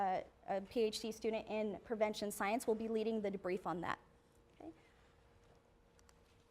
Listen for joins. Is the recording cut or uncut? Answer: cut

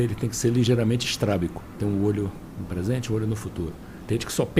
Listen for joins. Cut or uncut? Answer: cut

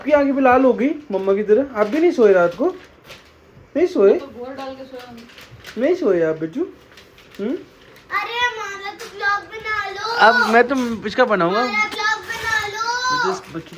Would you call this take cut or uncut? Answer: uncut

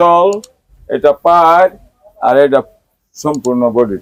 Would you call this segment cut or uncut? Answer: uncut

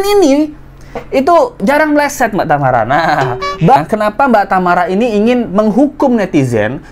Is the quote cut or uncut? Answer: cut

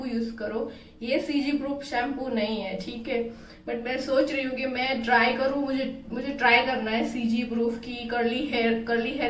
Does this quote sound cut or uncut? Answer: uncut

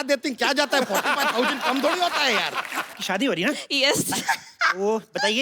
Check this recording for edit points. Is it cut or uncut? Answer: cut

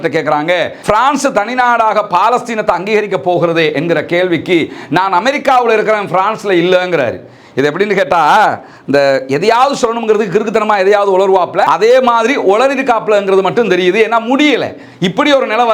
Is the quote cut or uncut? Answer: uncut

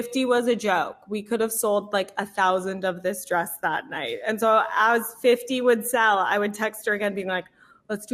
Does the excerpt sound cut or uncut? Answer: uncut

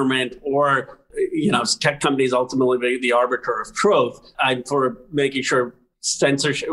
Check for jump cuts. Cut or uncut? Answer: cut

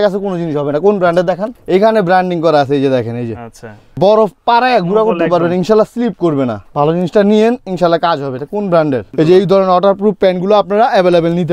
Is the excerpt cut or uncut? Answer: cut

